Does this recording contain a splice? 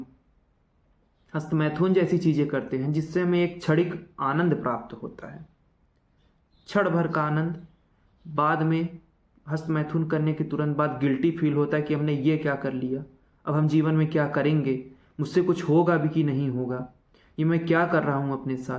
no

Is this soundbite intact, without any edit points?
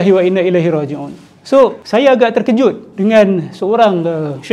no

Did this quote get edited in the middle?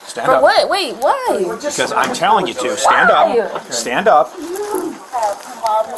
no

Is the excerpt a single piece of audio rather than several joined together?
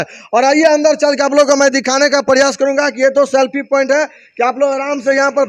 yes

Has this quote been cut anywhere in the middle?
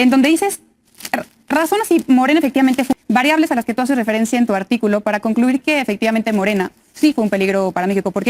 yes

